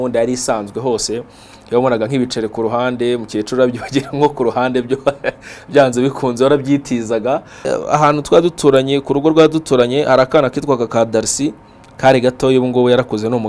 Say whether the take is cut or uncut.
cut